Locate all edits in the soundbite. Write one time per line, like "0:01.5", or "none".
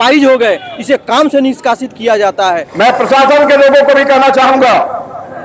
0:02.7